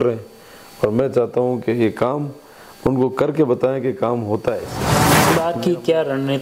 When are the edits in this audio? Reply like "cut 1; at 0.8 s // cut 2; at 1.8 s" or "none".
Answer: cut 1; at 5.2 s